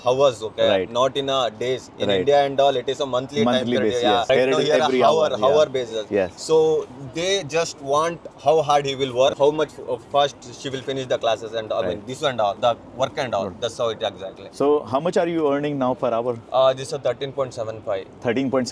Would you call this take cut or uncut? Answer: uncut